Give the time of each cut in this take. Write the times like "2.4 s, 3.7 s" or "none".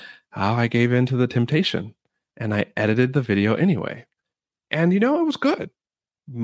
none